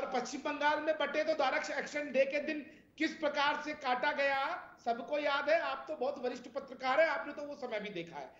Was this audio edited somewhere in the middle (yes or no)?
no